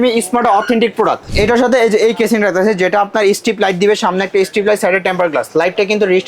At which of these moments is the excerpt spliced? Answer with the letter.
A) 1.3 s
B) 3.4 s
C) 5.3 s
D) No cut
A